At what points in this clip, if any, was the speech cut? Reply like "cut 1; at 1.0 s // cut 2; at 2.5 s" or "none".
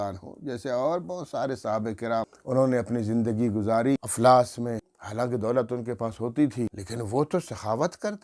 cut 1; at 2.4 s // cut 2; at 4.1 s // cut 3; at 5.0 s // cut 4; at 6.8 s